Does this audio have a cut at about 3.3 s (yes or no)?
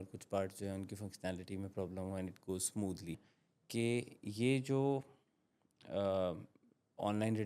yes